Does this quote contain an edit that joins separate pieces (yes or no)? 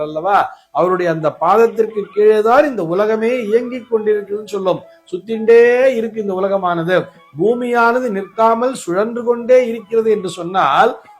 no